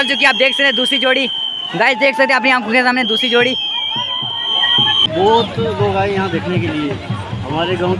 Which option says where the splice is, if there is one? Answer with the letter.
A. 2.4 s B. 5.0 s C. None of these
B